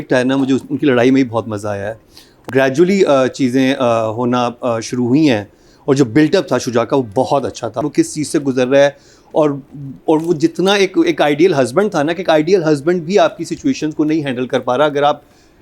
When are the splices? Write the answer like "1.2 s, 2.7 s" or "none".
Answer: 2.5 s, 7.8 s